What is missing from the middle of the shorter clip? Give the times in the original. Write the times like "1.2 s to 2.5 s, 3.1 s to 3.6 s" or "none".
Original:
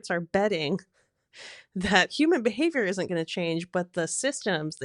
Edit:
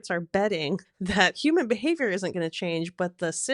0.9 s to 1.7 s